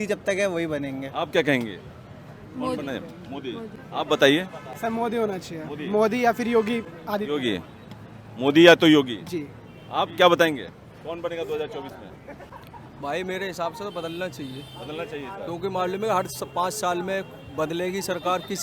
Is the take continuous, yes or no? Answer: yes